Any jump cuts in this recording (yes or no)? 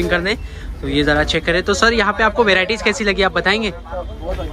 no